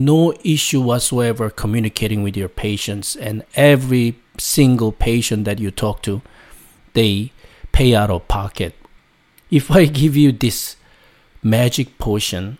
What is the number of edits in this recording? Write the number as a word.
one